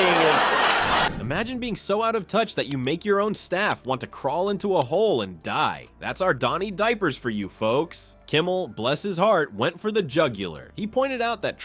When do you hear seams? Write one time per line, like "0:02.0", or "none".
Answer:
none